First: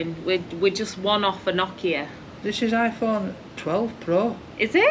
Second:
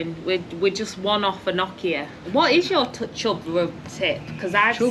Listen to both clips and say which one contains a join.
second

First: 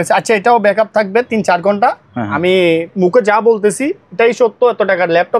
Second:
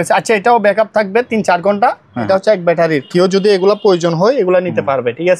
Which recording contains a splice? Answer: second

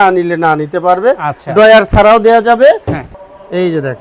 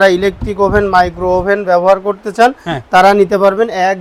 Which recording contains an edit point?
first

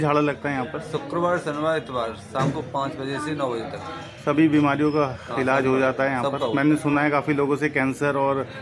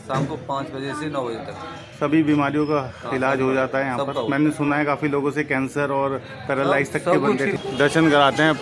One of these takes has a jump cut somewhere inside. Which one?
second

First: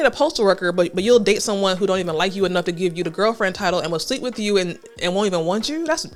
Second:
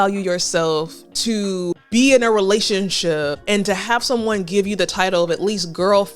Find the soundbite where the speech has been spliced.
second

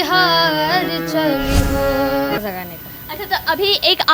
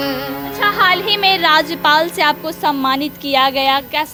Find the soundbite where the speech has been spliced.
first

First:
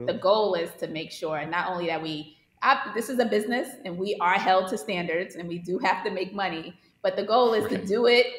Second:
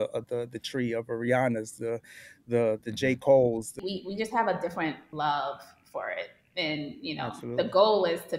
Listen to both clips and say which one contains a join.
second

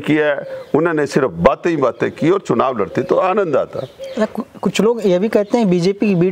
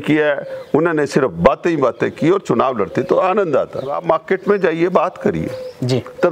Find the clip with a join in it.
second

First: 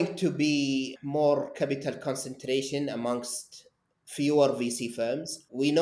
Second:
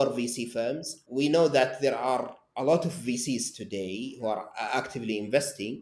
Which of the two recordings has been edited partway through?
first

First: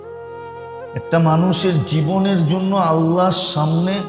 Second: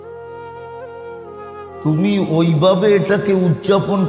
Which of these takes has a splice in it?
second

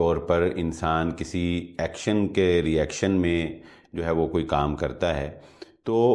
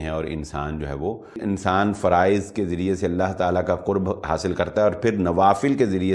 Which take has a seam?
second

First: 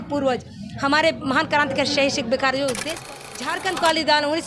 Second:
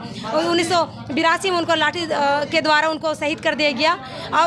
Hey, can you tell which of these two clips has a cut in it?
first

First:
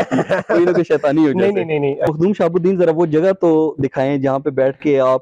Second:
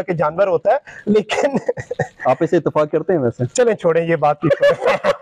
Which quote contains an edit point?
first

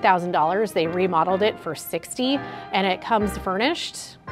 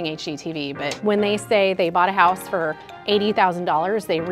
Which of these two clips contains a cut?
second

